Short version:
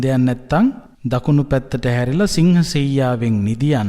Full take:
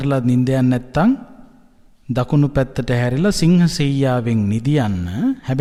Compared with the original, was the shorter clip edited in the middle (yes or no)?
yes